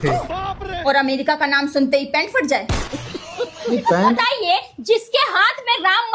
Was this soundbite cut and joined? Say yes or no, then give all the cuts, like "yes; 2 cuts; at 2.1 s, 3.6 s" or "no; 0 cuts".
yes; 1 cut; at 4.2 s